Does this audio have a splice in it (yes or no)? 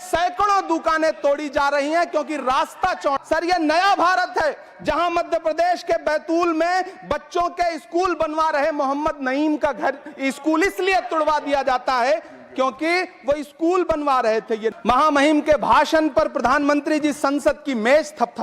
yes